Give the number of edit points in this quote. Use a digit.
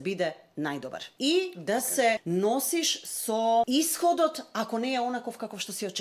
3